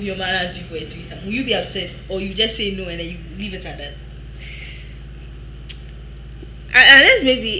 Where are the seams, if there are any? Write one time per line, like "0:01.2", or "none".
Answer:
none